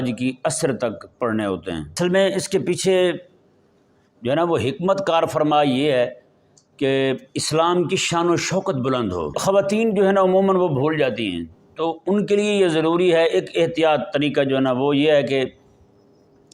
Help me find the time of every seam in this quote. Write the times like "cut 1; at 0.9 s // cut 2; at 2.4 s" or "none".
cut 1; at 1.9 s // cut 2; at 9.4 s